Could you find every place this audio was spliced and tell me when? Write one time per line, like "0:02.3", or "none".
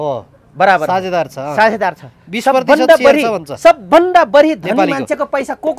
none